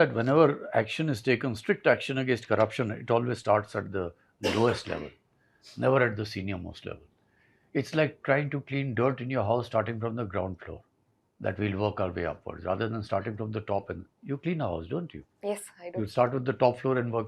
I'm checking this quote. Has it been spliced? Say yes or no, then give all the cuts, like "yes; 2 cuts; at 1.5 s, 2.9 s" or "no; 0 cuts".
no; 0 cuts